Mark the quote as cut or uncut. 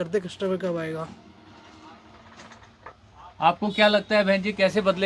uncut